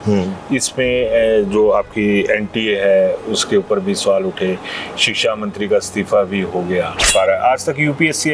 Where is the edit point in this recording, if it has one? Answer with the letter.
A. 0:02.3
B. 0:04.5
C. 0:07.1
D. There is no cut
C